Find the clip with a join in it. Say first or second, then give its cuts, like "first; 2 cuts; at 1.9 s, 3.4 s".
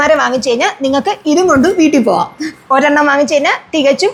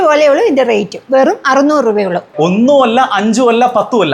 second; 1 cut; at 2.3 s